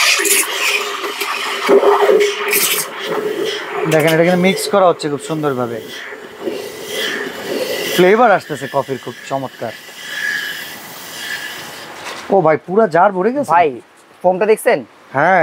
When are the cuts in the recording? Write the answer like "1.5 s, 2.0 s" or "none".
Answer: none